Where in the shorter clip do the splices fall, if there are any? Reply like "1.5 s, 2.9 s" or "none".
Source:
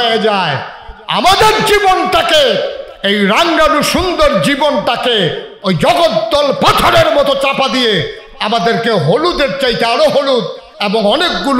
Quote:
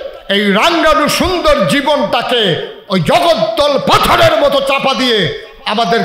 none